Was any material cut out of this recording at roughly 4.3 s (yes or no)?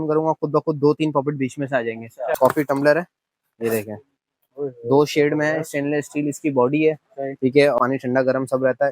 no